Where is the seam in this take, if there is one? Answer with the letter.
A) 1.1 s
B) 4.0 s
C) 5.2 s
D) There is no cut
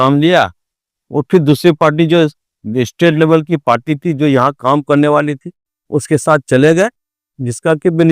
D